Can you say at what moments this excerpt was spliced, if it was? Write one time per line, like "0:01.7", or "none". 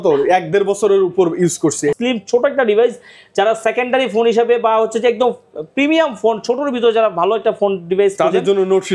0:01.9